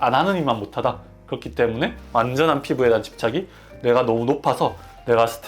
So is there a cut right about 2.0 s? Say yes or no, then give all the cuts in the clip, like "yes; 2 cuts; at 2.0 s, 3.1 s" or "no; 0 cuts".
yes; 1 cut; at 2.0 s